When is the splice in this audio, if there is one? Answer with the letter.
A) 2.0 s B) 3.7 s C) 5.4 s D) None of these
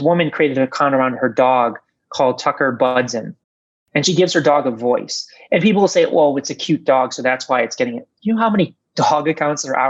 D